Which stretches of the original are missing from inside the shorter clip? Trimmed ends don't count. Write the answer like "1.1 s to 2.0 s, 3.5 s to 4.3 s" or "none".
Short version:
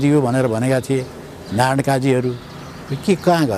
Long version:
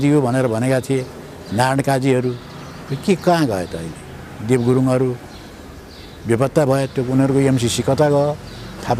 none